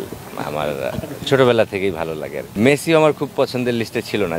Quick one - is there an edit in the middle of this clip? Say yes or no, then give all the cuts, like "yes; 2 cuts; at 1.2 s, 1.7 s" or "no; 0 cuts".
yes; 1 cut; at 2.6 s